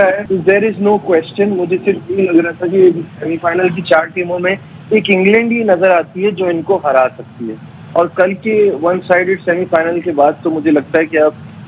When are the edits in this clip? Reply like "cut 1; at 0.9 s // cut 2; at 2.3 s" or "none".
none